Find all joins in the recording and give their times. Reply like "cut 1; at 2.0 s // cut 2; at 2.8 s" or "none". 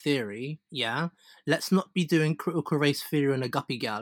none